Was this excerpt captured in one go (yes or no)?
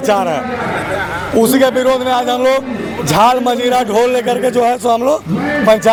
yes